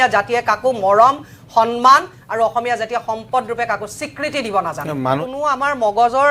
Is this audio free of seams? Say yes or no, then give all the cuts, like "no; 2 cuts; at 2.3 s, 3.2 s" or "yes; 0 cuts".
no; 1 cut; at 5.2 s